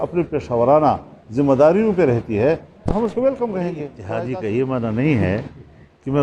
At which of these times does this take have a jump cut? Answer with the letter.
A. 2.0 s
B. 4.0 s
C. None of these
B